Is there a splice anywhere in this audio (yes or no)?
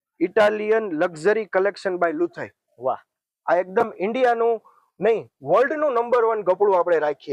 no